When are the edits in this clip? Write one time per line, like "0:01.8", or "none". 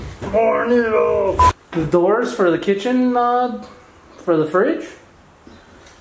0:01.5